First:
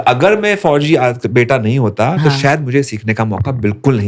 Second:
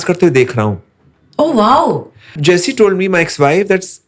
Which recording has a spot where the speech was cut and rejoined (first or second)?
second